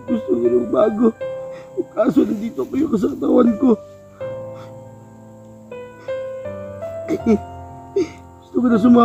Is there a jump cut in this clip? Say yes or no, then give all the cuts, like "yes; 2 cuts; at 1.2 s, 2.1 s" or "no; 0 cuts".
no; 0 cuts